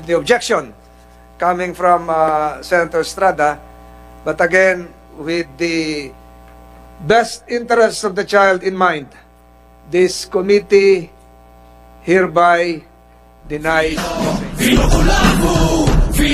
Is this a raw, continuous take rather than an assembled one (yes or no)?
no